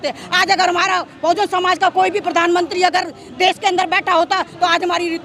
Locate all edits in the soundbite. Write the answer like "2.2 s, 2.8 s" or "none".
none